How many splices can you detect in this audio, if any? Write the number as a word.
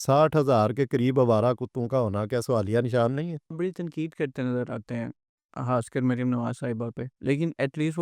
one